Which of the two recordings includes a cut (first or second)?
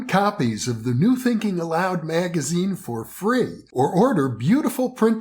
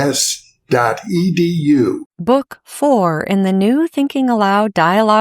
second